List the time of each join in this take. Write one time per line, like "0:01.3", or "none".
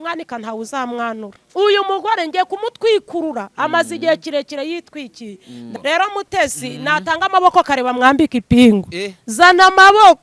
0:01.4
0:05.6

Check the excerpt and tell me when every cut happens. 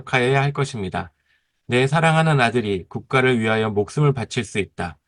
none

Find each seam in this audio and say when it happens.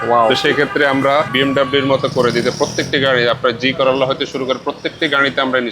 0:01.3

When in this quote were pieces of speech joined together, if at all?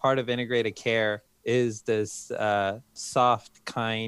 0:01.3
0:03.0

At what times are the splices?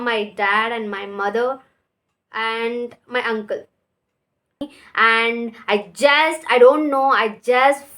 0:04.7

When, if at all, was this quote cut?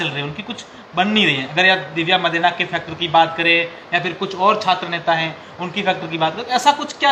none

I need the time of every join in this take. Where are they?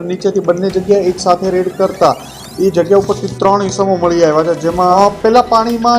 0:04.9

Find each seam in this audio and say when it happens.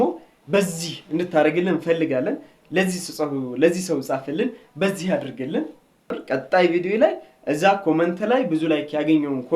0:06.2

